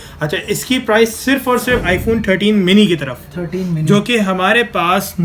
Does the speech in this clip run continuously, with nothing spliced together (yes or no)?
no